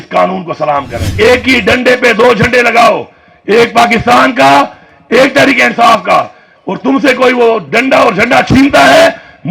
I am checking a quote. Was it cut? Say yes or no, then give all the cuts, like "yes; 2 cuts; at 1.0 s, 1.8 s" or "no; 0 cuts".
yes; 1 cut; at 1.1 s